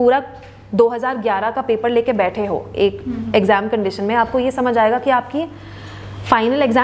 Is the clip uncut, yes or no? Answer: yes